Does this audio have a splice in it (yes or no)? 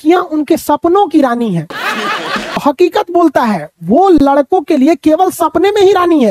yes